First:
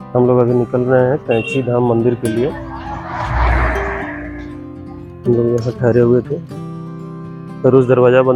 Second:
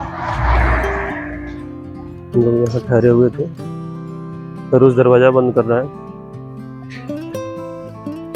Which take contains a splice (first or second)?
second